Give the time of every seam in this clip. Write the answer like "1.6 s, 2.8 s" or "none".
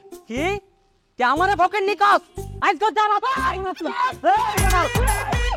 none